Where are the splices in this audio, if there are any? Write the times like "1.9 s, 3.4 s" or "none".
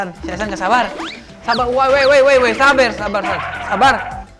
none